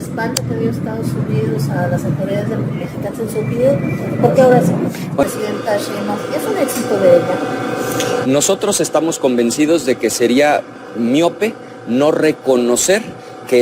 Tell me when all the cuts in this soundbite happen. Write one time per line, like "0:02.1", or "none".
0:05.1